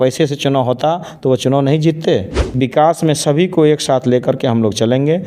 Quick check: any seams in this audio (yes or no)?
yes